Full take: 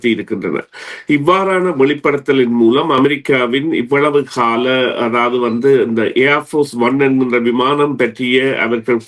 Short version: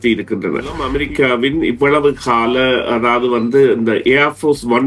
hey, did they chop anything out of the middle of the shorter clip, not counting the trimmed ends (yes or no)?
yes